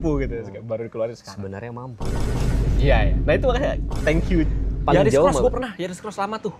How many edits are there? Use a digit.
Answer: 1